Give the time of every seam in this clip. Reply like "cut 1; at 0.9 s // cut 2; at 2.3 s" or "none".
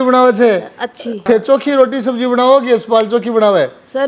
cut 1; at 1.2 s